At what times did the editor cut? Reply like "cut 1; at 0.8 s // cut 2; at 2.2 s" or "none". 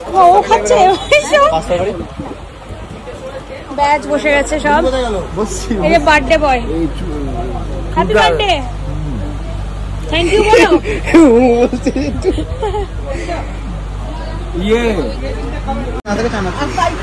cut 1; at 16.0 s